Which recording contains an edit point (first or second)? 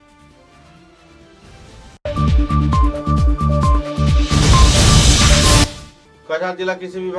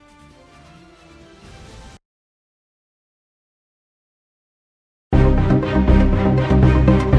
first